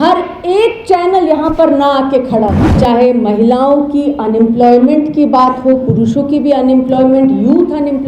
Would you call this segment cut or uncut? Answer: cut